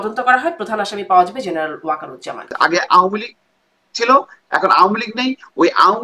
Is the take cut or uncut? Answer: cut